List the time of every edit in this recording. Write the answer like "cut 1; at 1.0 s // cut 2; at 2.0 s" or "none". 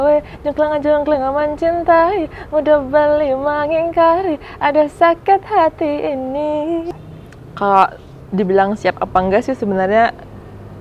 cut 1; at 6.9 s

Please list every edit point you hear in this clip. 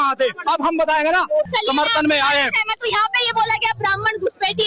cut 1; at 1.5 s

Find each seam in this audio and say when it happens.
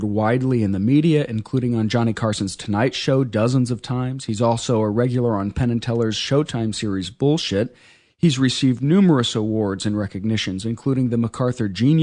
cut 1; at 11.0 s

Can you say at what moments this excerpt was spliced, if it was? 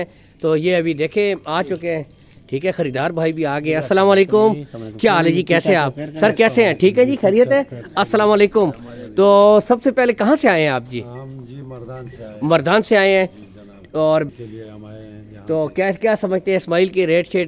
cut 1; at 14.3 s

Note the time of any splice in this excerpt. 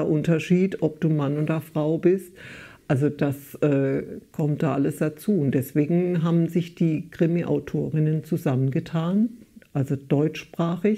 none

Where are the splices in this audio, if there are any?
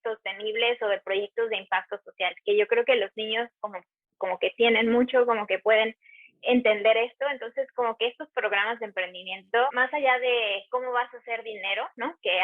cut 1; at 9.7 s

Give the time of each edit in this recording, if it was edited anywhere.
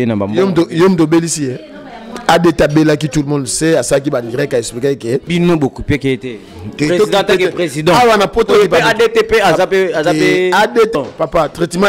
cut 1; at 5.3 s // cut 2; at 10.9 s

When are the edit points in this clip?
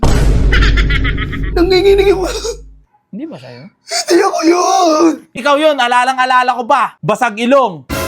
cut 1; at 5.3 s // cut 2; at 6.9 s

